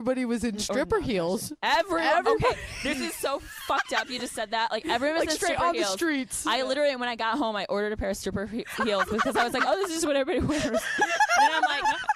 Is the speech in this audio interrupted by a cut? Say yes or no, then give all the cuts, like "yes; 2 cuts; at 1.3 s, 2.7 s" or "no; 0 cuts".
yes; 1 cut; at 1.5 s